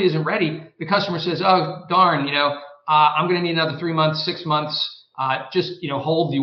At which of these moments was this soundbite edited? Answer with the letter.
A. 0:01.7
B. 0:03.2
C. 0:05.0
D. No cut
D